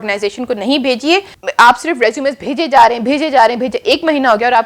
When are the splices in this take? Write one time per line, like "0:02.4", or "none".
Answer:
0:01.4